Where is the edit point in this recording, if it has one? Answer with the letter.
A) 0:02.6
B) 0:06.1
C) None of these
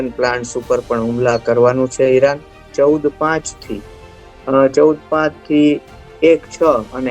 A